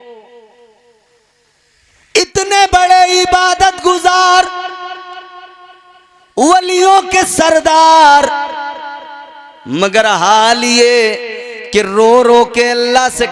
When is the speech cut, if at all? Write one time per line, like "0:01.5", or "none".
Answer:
none